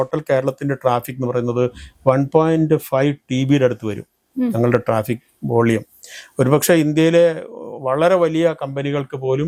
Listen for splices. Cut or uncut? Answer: uncut